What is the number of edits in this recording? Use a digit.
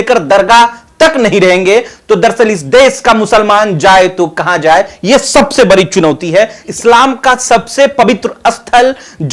1